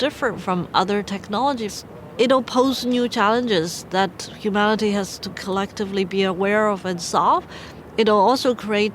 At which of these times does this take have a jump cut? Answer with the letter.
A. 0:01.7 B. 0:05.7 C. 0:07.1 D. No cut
A